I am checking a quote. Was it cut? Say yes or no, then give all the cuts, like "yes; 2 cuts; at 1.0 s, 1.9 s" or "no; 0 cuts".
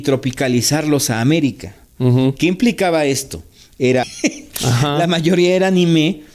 yes; 1 cut; at 4.1 s